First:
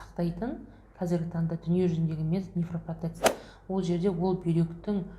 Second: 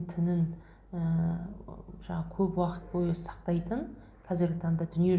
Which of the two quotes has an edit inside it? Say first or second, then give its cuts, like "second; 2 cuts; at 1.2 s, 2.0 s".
first; 1 cut; at 3.2 s